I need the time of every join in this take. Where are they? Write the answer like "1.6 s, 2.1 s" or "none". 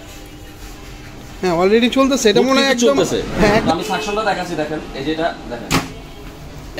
3.6 s